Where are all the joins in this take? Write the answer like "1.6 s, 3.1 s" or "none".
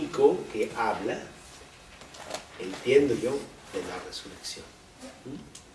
1.6 s